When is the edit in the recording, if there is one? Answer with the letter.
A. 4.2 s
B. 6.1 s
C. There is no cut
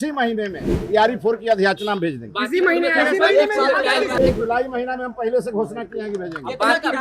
A